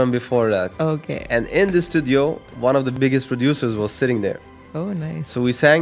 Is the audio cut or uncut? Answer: cut